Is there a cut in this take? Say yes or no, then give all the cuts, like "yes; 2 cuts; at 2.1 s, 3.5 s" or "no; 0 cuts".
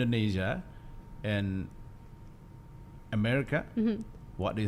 no; 0 cuts